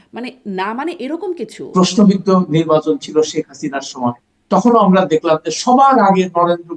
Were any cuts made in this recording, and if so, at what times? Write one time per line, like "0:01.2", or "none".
0:01.5